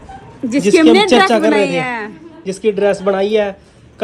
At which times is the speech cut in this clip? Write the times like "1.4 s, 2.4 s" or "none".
none

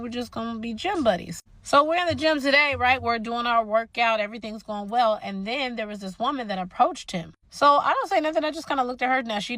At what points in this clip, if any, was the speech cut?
0.9 s

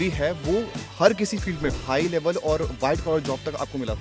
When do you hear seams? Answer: 1.8 s

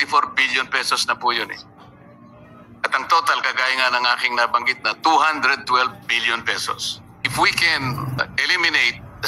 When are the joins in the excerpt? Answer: 7.2 s, 8.2 s

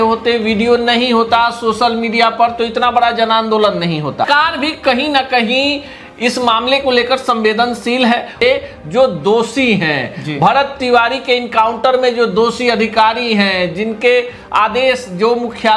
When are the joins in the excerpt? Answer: 4.2 s, 8.4 s

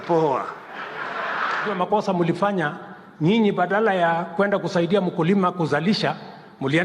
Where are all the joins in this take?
1.7 s

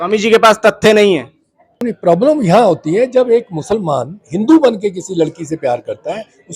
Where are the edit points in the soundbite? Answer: 1.9 s

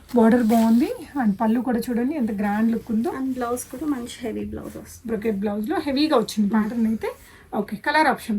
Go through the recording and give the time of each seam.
none

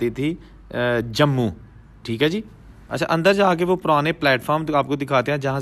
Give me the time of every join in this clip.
none

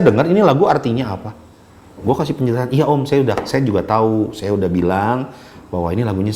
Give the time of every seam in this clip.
none

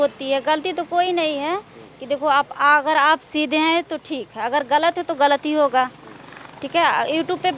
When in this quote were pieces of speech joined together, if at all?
none

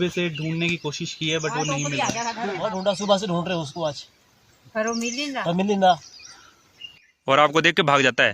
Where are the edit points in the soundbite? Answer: 2.6 s

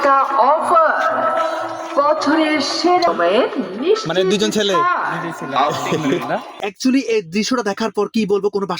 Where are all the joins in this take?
3.1 s, 6.7 s

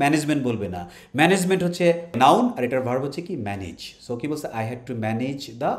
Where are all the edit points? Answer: 2.1 s

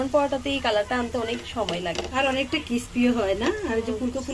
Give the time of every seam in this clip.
none

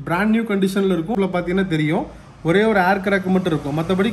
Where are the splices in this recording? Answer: 1.1 s

